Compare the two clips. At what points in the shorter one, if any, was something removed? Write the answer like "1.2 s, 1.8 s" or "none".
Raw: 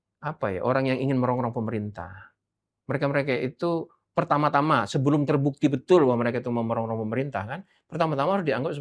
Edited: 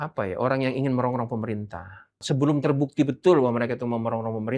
2.2 s